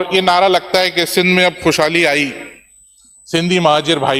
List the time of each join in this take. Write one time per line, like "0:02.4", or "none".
none